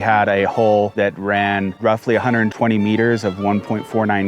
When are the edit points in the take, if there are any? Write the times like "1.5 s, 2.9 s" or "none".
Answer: 0.9 s